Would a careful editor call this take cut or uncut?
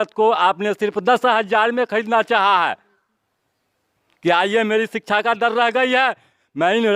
uncut